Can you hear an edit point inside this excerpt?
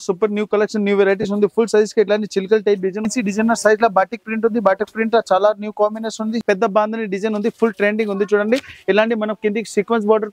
yes; 2 cuts; at 3.0 s, 6.4 s

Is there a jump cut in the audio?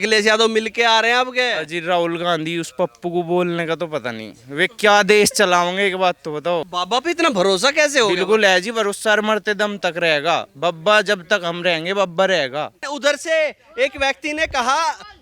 yes; 2 cuts; at 6.7 s, 12.8 s

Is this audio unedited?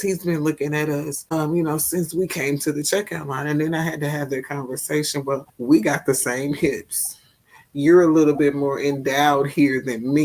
no; 2 cuts; at 1.2 s, 5.5 s

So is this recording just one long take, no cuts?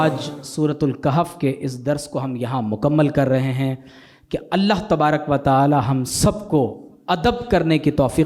yes; 0 cuts

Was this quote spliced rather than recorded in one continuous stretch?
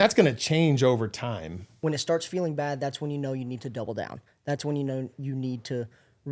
yes; 1 cut; at 1.6 s

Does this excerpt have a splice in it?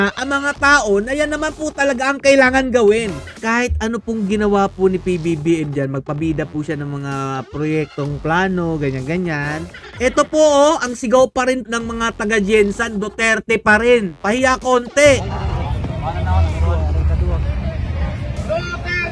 yes; 3 cuts; at 3.4 s, 9.8 s, 11.6 s

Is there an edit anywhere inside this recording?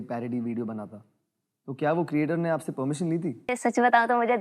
yes; 1 cut; at 3.4 s

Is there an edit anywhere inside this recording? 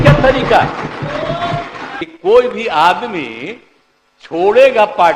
yes; 1 cut; at 2.0 s

